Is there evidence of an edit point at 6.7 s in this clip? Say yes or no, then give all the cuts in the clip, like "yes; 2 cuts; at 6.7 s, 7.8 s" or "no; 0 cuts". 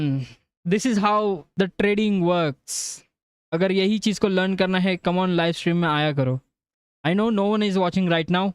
no; 1 cut; at 1.4 s